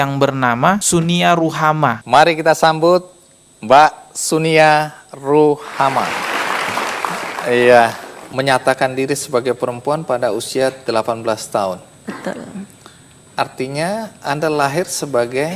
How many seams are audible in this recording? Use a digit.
0